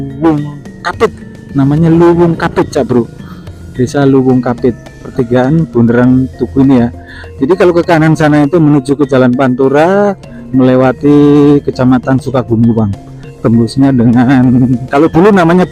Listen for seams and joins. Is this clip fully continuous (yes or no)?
no